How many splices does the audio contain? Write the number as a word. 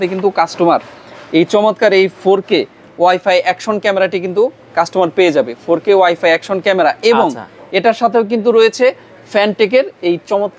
zero